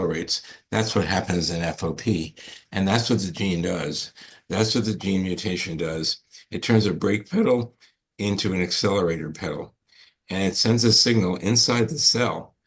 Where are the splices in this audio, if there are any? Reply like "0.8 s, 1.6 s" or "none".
none